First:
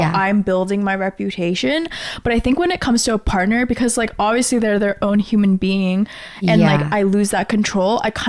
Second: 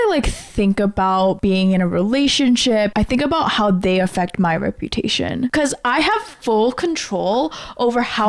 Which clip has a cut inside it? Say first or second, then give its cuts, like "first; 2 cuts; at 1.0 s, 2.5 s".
second; 3 cuts; at 1.4 s, 2.9 s, 5.5 s